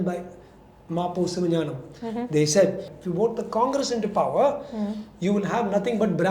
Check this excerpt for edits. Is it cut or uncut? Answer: cut